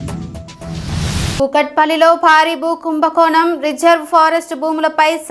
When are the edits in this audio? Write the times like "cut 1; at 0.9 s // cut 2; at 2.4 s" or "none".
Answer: cut 1; at 1.4 s